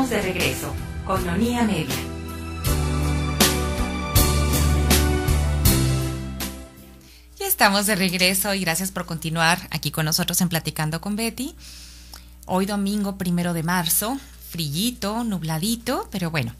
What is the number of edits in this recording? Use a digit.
1